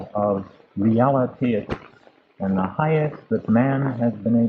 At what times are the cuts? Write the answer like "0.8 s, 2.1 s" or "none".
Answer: 3.6 s